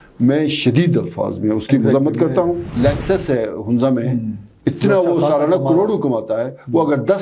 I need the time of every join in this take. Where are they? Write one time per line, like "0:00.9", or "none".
0:02.7

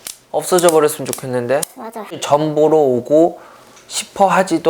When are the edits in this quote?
0:02.2

